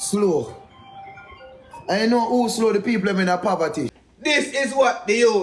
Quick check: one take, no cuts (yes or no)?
no